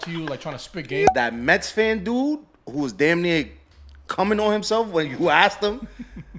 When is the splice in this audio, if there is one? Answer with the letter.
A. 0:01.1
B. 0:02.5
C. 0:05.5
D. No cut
A